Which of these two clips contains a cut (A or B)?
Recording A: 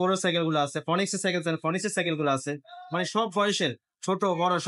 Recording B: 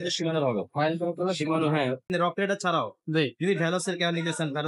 B